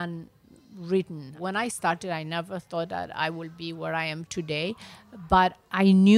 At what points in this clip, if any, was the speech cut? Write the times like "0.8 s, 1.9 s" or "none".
none